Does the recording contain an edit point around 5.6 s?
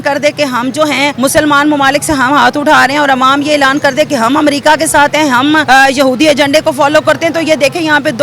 yes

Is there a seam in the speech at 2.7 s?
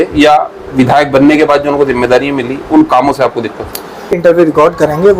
no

